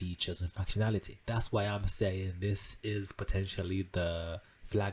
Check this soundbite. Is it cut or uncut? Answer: cut